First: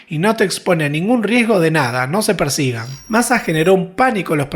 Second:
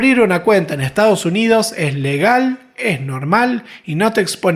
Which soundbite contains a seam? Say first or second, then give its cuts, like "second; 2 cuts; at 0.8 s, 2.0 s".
first; 1 cut; at 2.9 s